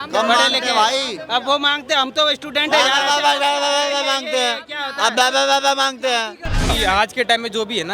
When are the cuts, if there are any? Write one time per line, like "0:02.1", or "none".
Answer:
0:06.7

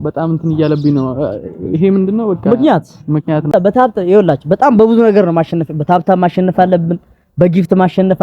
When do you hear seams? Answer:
0:03.5

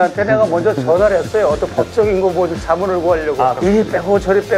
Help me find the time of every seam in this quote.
0:03.6

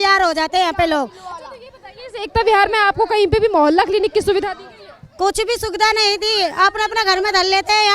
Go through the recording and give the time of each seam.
none

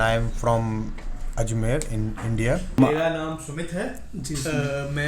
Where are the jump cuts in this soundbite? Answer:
0:02.8

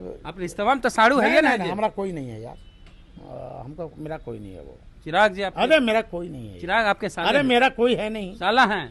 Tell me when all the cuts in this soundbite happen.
none

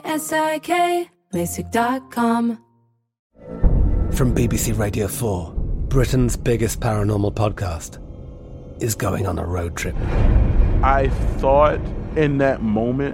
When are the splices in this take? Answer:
none

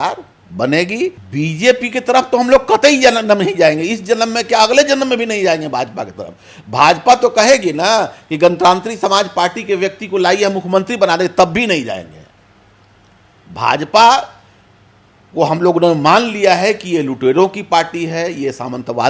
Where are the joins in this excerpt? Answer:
0:01.2

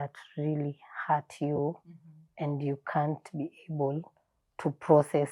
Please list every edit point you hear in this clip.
none

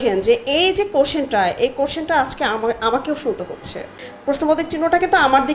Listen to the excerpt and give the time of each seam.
0:03.8

